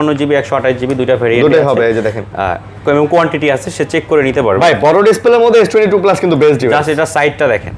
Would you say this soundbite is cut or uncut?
uncut